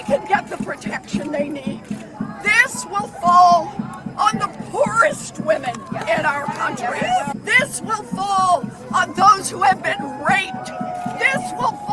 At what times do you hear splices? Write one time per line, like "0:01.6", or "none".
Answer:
0:07.4